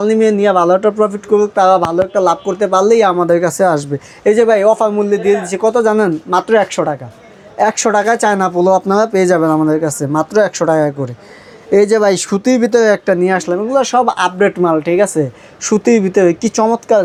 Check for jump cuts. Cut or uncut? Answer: uncut